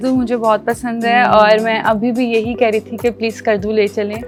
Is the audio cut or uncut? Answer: uncut